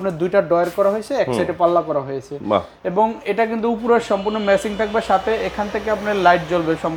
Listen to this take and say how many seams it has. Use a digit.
0